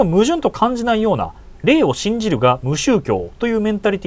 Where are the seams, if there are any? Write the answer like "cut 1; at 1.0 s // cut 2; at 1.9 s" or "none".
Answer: none